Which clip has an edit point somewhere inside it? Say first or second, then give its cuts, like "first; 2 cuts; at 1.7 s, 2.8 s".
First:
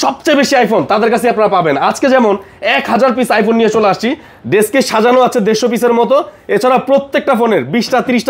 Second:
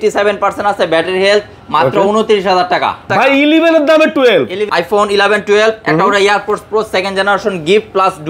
second; 2 cuts; at 3.0 s, 4.7 s